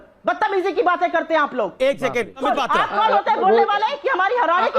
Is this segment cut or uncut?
cut